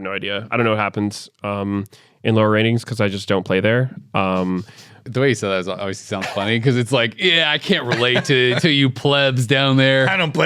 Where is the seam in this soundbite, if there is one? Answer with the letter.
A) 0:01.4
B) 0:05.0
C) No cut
B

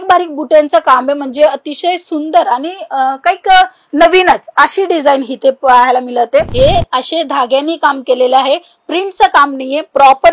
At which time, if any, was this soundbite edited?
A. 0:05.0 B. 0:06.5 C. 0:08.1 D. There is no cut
B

